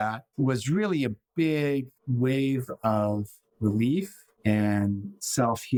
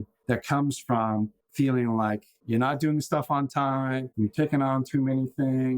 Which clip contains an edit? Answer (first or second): second